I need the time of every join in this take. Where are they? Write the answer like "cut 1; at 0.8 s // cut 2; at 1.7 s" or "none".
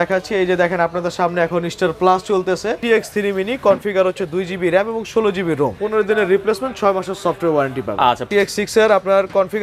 cut 1; at 2.8 s // cut 2; at 5.8 s // cut 3; at 8.3 s